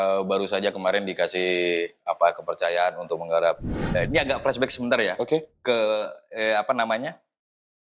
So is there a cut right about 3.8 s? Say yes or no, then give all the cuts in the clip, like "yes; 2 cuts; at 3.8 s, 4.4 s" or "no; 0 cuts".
yes; 1 cut; at 3.8 s